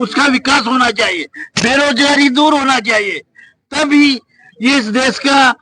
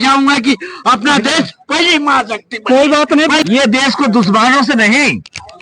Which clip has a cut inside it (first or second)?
second